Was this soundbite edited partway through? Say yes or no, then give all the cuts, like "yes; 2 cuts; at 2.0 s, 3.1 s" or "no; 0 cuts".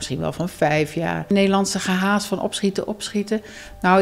yes; 1 cut; at 1.3 s